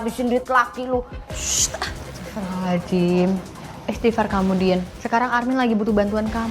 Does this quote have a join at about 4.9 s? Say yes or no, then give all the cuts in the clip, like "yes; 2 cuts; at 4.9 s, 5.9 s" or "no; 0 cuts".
yes; 2 cuts; at 1.4 s, 4.9 s